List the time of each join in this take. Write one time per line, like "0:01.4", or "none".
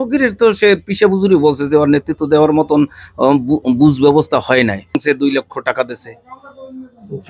0:05.0